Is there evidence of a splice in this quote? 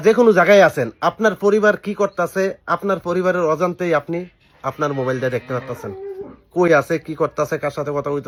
no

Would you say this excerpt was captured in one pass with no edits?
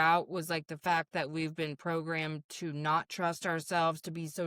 yes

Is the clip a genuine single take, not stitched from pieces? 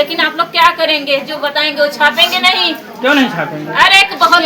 yes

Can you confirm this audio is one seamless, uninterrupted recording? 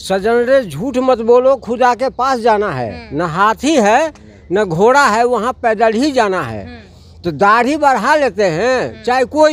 yes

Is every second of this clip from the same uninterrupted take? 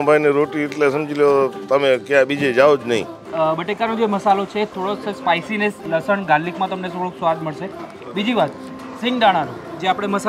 no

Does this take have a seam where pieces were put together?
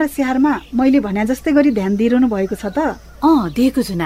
yes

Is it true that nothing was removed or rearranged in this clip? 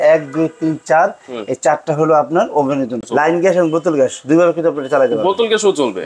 no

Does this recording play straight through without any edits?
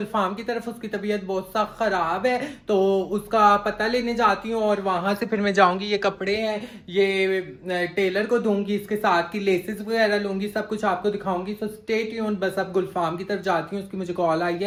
yes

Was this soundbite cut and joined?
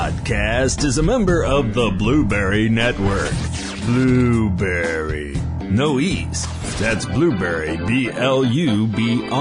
no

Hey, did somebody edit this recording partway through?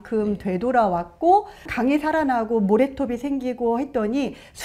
yes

